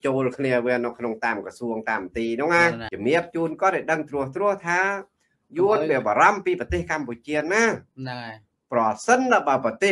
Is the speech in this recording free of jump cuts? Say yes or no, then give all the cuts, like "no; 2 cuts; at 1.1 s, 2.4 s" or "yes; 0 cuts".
no; 1 cut; at 2.9 s